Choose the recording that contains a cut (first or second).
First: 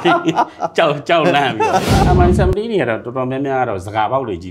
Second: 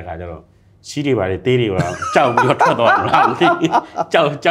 first